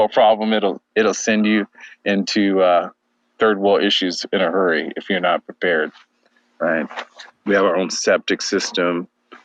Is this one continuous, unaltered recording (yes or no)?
yes